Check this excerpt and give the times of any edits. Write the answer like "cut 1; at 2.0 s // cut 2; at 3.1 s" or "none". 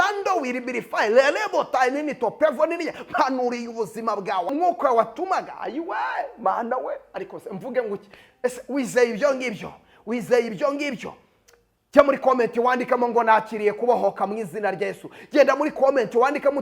cut 1; at 4.5 s